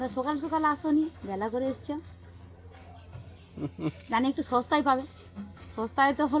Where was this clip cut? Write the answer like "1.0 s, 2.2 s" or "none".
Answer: none

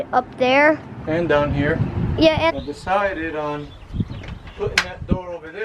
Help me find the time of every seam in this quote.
2.5 s

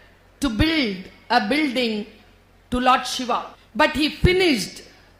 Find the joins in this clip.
3.6 s

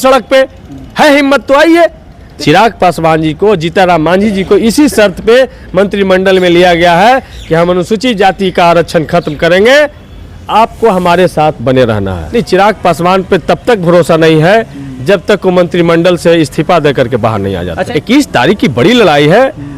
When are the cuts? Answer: 2.2 s, 12.1 s, 17.8 s

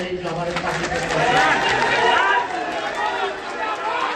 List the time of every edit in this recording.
none

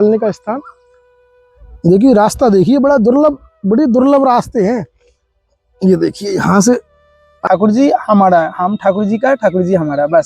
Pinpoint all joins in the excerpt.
7.4 s

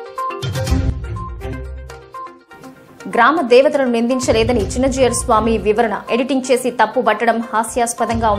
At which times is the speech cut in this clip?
1.0 s, 2.4 s

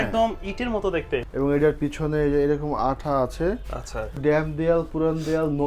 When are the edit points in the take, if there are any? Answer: 1.3 s, 4.1 s

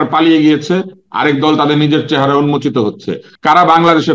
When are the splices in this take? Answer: 3.2 s

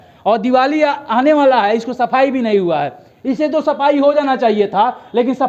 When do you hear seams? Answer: none

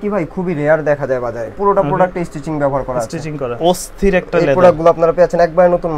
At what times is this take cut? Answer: 1.5 s, 3.5 s

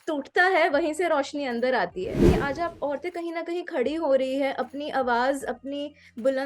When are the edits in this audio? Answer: 2.3 s

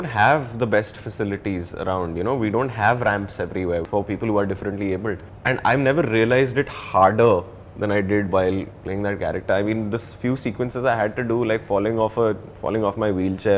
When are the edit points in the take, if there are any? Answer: 3.8 s, 5.3 s

